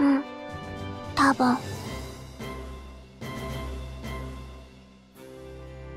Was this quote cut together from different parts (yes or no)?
yes